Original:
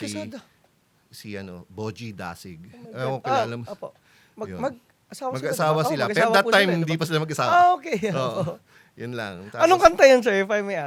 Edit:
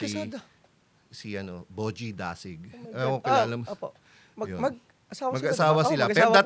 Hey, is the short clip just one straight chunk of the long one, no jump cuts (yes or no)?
yes